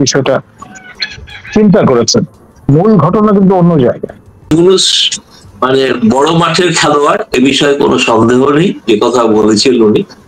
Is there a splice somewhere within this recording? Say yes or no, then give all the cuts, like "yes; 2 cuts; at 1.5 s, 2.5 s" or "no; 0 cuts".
yes; 1 cut; at 4.5 s